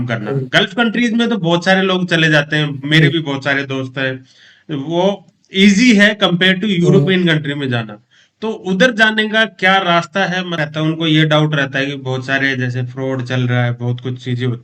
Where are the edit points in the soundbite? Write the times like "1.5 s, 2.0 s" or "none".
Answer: 10.6 s

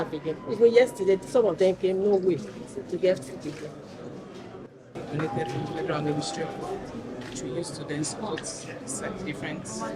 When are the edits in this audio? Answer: 4.9 s

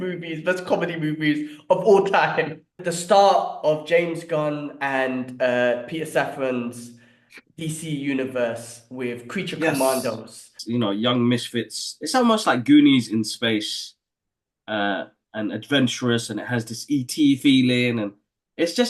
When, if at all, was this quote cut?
2.8 s, 10.6 s

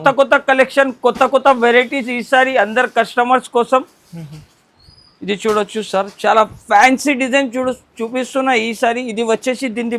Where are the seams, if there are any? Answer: none

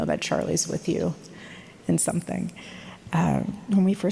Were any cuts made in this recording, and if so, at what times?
3.0 s

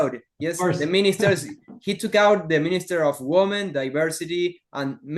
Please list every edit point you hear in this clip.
none

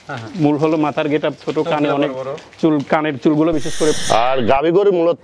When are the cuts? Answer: 4.0 s

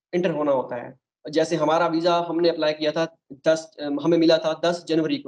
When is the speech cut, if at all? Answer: none

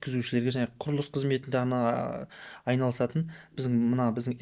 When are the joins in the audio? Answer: none

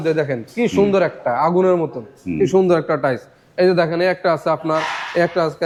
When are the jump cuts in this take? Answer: none

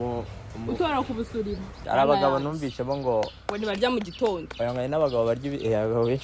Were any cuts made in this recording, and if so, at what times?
1.8 s

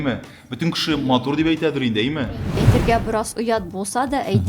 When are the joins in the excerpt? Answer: 2.6 s

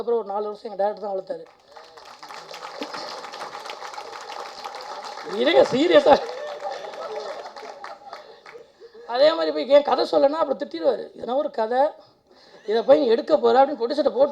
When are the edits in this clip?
8.8 s

